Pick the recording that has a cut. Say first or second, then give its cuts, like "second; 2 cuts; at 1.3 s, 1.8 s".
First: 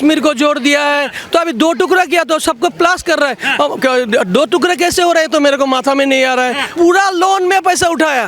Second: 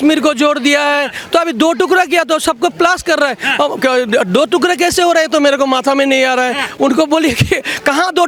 first; 1 cut; at 6.7 s